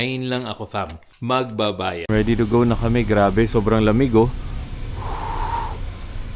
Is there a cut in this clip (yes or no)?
yes